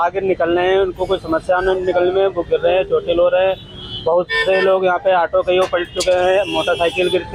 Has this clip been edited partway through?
no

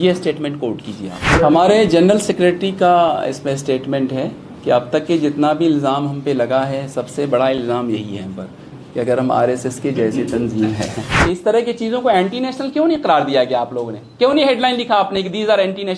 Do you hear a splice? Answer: yes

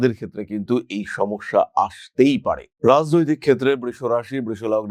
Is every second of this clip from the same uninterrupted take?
yes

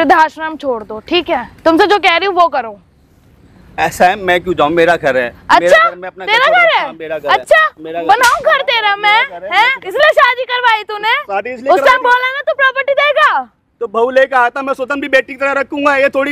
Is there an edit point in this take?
no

